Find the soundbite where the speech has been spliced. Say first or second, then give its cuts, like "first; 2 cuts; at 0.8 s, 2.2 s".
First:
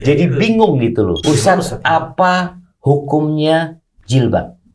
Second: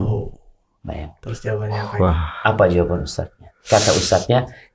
first; 1 cut; at 1.2 s